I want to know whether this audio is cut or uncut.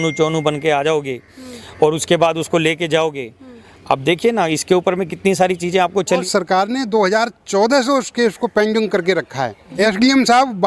cut